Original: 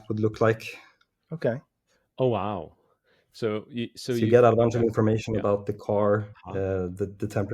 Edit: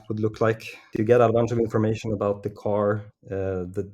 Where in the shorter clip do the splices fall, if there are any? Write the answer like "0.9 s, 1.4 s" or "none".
1.0 s